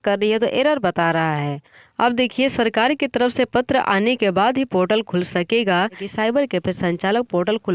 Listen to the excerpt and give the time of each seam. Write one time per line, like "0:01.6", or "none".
0:01.8
0:06.1

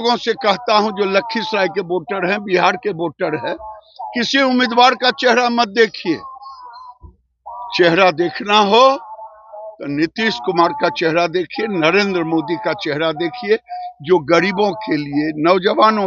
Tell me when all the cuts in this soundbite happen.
none

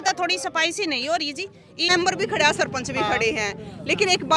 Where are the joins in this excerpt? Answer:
0:01.9

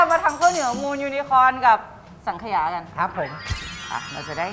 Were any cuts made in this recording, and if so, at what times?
0:03.5

